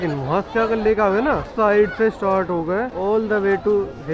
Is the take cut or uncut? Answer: cut